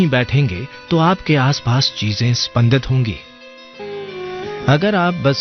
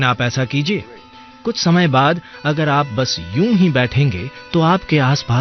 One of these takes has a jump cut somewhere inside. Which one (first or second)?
first